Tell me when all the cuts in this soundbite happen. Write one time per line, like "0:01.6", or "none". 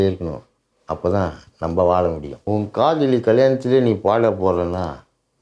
0:02.4